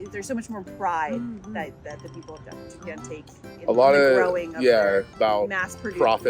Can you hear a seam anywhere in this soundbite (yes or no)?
yes